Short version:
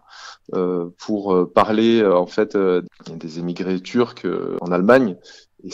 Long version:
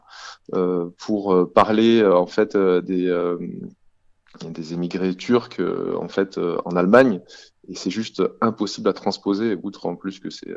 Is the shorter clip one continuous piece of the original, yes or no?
no